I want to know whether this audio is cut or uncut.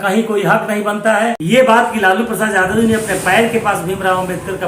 cut